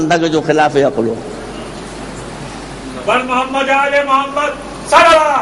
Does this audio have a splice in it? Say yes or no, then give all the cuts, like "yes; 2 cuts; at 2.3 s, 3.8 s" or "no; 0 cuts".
yes; 1 cut; at 1.0 s